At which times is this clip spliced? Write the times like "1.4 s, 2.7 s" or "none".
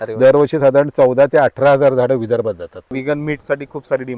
2.9 s

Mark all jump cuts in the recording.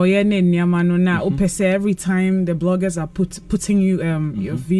none

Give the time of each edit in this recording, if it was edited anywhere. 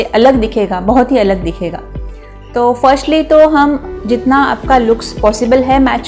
none

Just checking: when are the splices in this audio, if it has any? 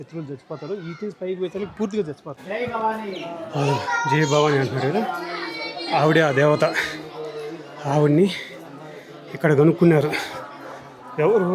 2.3 s

